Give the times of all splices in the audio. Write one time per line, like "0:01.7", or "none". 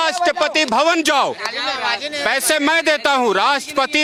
none